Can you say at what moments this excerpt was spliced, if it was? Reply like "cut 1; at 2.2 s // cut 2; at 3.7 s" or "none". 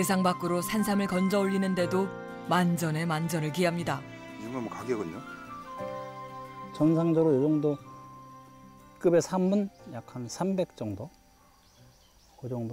none